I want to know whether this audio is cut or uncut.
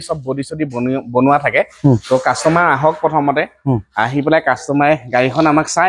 uncut